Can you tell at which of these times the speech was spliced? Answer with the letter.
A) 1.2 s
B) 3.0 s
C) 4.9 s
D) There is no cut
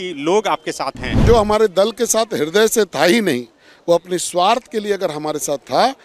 A